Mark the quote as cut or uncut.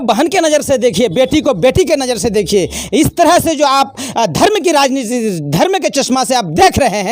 uncut